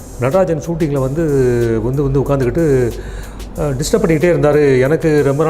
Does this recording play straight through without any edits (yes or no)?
yes